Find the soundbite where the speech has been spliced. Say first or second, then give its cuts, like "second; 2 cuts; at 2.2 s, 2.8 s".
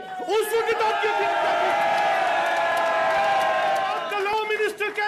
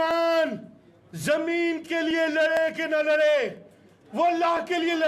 first; 1 cut; at 4.0 s